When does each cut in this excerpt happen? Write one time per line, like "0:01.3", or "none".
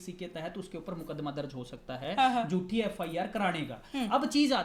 none